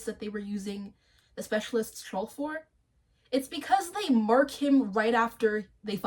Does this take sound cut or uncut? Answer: uncut